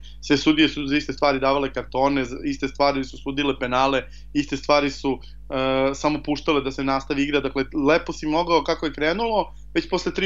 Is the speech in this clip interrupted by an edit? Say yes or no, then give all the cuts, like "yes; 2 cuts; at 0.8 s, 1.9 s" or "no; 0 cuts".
no; 0 cuts